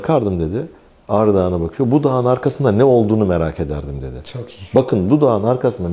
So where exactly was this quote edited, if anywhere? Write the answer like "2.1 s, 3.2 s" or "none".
none